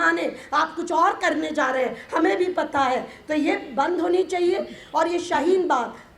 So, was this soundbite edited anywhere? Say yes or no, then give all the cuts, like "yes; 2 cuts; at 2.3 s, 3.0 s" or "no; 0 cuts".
no; 0 cuts